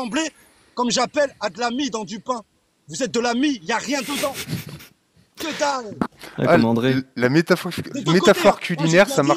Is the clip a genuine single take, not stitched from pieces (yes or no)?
yes